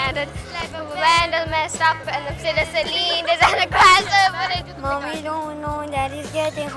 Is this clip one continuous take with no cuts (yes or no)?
no